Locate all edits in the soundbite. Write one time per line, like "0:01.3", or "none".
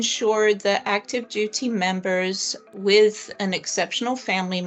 0:02.6